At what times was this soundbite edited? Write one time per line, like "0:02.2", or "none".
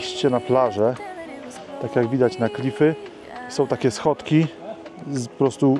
none